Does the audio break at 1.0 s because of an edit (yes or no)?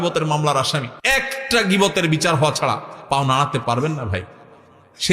yes